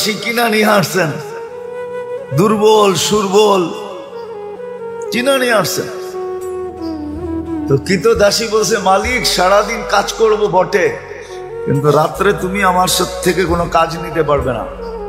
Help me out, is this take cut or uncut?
uncut